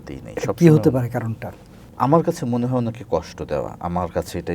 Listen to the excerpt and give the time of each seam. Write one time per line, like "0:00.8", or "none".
0:01.8